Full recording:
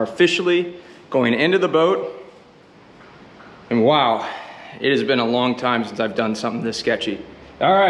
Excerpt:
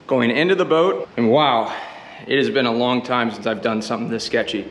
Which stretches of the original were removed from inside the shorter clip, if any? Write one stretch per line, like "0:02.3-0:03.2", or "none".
0:02.1-0:03.6